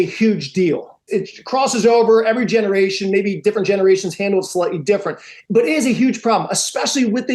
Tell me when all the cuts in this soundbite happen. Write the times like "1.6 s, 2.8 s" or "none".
1.1 s